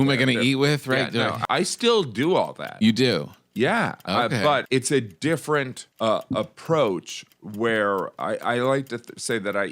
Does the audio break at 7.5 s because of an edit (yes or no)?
no